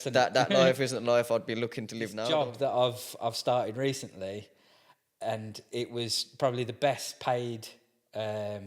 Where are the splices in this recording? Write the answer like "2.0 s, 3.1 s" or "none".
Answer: 2.2 s